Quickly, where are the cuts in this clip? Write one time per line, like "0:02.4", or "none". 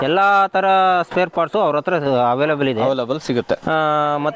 none